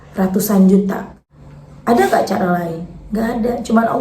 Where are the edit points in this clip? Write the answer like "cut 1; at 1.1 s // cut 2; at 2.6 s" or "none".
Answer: cut 1; at 1.1 s